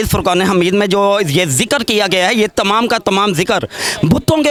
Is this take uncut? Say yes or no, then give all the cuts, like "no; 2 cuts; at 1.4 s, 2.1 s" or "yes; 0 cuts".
yes; 0 cuts